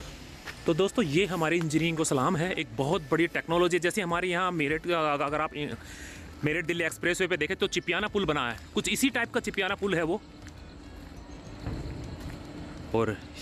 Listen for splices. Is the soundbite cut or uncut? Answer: uncut